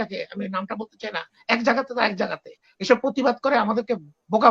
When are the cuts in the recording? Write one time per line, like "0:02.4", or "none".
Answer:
none